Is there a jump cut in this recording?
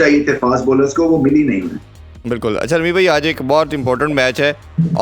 no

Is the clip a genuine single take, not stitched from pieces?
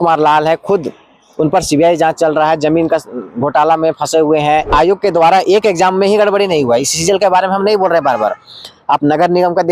no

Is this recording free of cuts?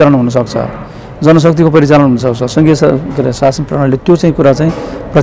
yes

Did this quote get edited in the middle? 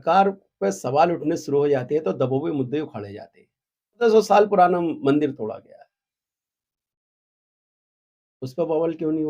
yes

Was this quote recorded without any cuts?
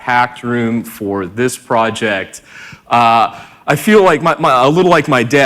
no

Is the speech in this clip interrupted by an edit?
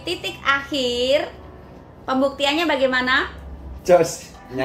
no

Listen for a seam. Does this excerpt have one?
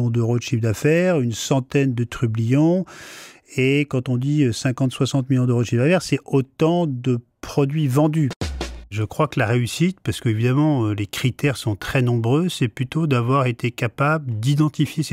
yes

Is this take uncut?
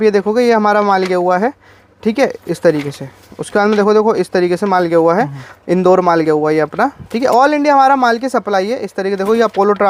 yes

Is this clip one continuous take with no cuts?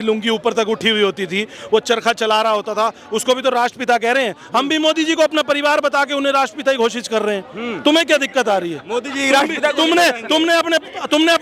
yes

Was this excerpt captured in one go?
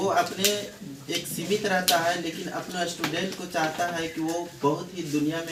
yes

